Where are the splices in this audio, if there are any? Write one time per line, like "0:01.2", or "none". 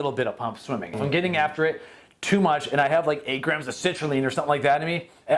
0:01.0